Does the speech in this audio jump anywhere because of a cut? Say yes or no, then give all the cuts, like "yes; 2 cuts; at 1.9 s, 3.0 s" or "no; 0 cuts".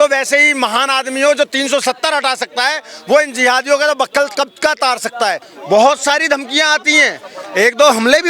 yes; 1 cut; at 5.5 s